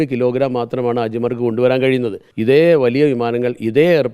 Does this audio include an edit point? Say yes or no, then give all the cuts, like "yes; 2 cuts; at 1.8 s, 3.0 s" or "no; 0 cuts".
yes; 1 cut; at 2.2 s